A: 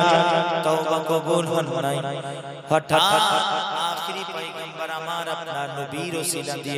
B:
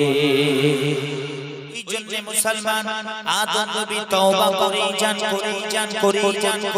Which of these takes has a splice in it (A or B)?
B